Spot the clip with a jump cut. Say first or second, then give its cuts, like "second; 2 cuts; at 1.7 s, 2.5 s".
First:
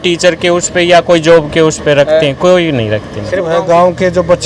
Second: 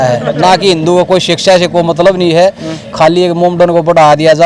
first; 1 cut; at 3.5 s